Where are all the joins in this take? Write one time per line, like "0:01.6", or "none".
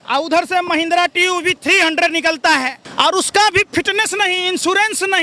0:02.8